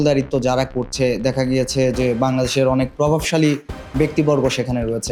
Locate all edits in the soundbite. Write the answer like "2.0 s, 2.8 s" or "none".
none